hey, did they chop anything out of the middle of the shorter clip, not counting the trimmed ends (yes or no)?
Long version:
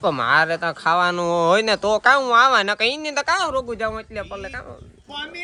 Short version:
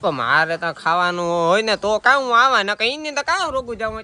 no